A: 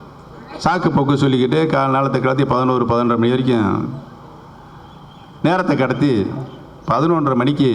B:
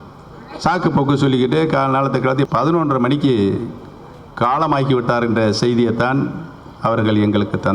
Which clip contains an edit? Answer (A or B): B